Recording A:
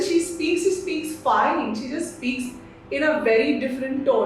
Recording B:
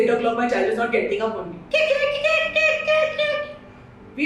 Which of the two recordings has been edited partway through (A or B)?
B